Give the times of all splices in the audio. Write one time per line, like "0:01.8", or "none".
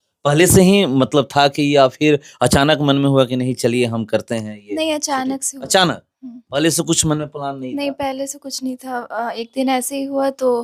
none